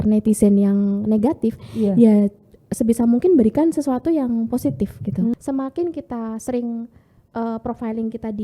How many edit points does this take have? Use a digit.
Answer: 1